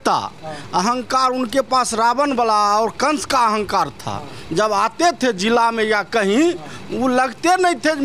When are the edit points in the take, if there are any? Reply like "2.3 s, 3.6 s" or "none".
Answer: none